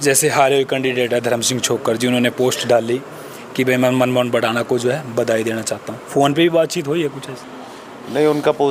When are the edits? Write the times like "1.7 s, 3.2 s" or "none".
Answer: none